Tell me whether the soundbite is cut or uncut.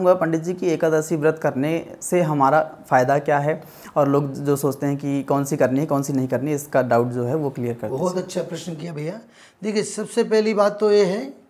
uncut